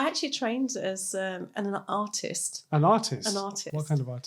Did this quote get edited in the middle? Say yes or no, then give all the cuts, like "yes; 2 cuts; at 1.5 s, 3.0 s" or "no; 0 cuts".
no; 0 cuts